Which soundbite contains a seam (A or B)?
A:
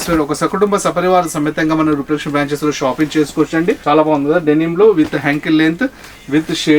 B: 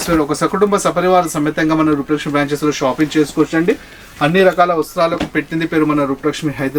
A